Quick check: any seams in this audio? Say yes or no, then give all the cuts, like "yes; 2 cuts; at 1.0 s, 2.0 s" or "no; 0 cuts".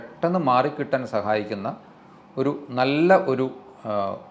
no; 0 cuts